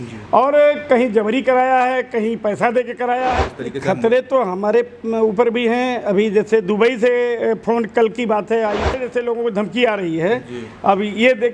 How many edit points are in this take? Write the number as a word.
two